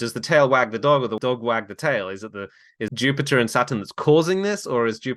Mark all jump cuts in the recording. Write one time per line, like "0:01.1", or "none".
0:01.2
0:02.9